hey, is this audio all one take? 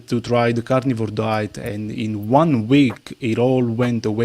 yes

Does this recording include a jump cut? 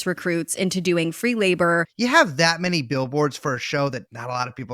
yes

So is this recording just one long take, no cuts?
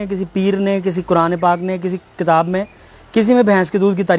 yes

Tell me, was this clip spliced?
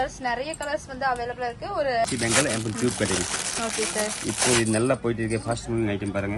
yes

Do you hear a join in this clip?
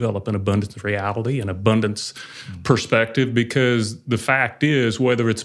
no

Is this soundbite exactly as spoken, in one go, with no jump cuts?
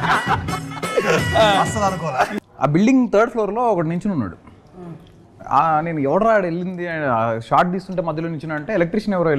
no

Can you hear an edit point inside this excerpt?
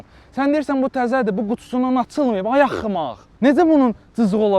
no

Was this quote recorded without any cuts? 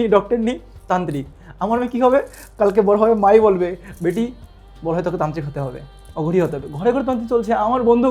yes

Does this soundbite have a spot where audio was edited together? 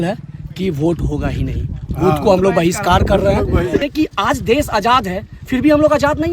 yes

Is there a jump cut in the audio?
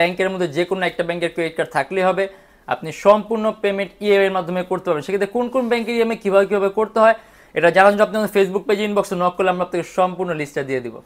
no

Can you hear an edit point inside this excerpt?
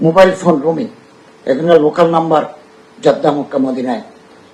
no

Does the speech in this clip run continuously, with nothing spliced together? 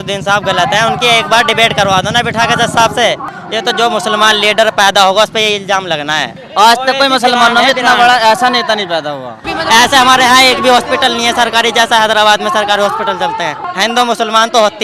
no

